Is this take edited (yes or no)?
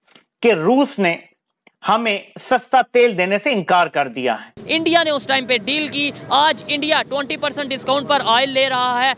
yes